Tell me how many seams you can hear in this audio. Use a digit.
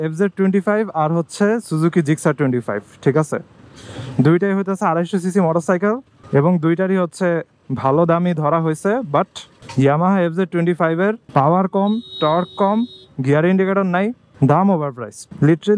0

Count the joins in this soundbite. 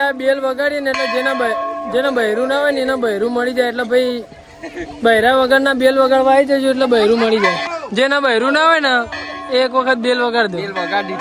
1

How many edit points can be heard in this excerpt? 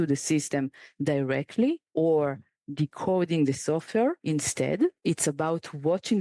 2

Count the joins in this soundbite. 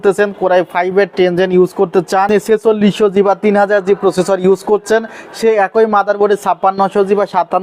1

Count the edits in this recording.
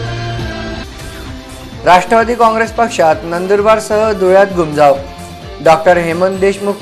1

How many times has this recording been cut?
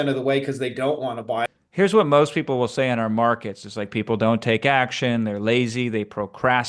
1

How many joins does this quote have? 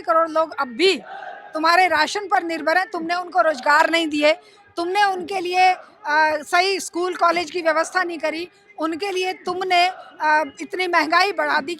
0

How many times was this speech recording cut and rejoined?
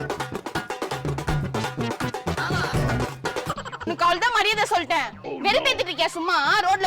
1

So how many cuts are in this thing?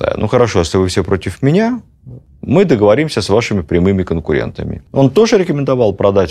1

